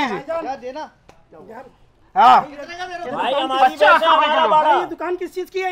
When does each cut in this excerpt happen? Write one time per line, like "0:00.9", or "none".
none